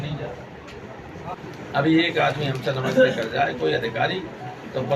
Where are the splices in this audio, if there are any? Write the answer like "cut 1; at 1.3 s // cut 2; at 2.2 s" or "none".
cut 1; at 1.3 s